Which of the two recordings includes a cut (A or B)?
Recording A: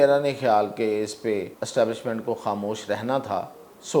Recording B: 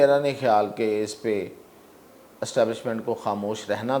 A